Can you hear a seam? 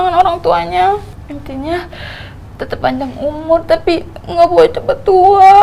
yes; 1 cut; at 1.1 s

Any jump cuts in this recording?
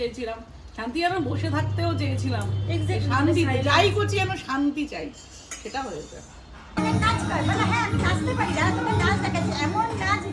yes; 1 cut; at 6.8 s

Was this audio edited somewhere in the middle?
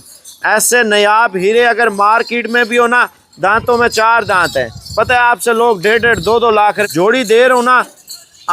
yes; 1 cut; at 6.8 s

